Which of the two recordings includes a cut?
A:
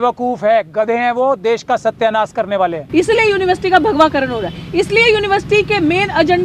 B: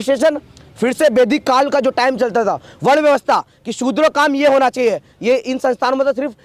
A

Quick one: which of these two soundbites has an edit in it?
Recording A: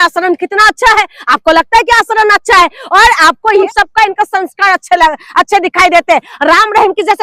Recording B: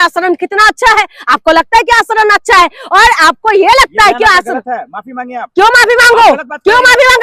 A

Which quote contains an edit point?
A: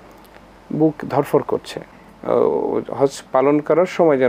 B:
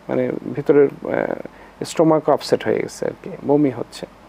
A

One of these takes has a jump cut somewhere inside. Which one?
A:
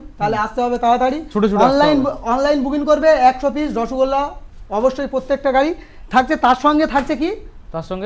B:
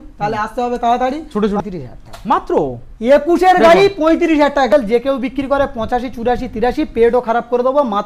B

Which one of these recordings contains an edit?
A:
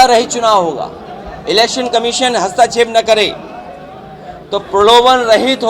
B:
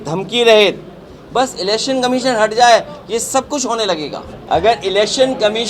B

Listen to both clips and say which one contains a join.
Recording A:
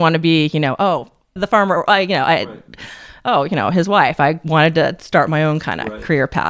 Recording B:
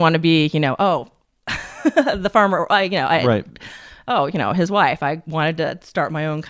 A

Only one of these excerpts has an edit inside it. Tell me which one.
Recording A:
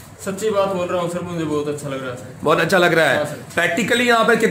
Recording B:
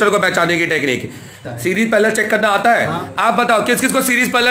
B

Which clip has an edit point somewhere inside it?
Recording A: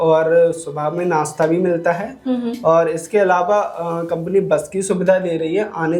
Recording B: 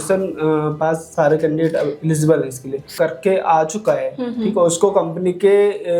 B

